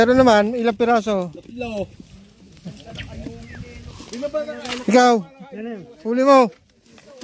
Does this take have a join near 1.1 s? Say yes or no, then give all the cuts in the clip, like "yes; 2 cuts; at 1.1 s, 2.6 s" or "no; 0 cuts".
no; 1 cut; at 3.9 s